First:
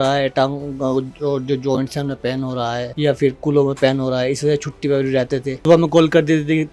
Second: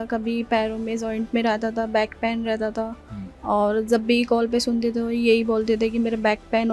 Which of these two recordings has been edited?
first; 2 cuts; at 2.9 s, 5.5 s

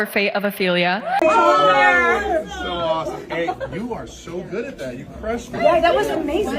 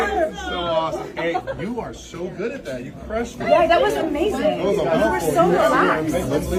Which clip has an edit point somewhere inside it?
first; 1 cut; at 1.2 s

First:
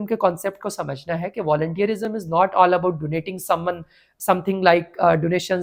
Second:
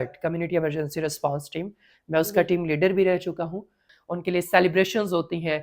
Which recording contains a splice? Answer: second; 1 cut; at 3.9 s

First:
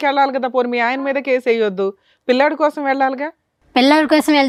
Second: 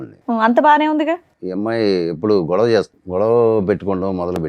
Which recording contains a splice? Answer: second; 2 cuts; at 1.4 s, 3.0 s

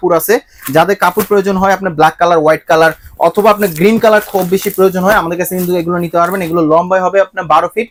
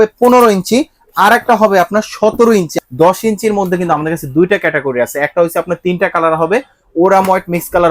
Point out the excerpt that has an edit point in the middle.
second; 1 cut; at 2.7 s

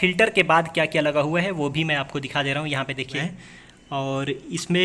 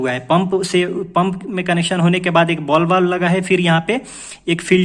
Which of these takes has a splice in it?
first; 1 cut; at 3.2 s

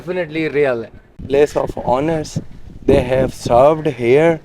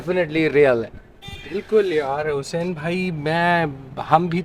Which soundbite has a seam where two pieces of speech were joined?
first; 1 cut; at 1.2 s

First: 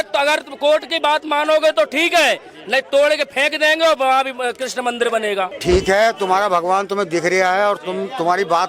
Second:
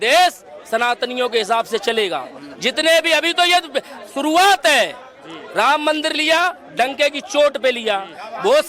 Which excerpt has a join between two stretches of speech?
first; 1 cut; at 5.5 s

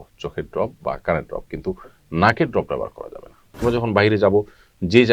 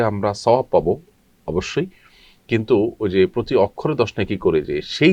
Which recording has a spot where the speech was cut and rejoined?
first; 1 cut; at 3.5 s

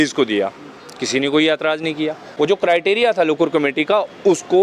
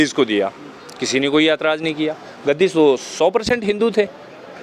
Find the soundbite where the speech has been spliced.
first; 1 cut; at 2.2 s

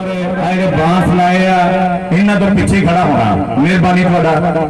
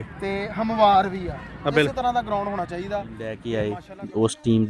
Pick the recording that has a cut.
second; 1 cut; at 3.4 s

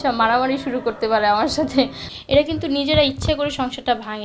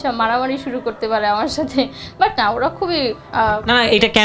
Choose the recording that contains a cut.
first; 1 cut; at 2.0 s

